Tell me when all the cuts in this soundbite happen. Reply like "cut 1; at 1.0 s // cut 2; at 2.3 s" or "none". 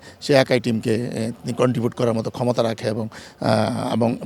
none